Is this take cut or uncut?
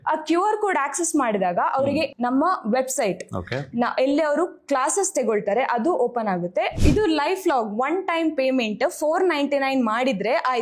cut